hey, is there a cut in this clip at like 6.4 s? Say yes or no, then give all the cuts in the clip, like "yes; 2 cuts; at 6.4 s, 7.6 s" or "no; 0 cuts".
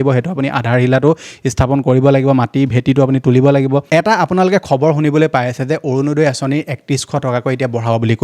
no; 1 cut; at 3.8 s